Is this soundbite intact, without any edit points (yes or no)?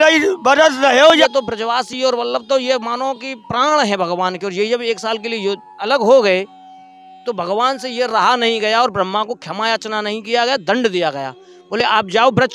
no